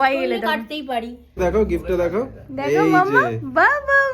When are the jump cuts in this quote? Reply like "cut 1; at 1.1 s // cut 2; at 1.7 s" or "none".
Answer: cut 1; at 1.4 s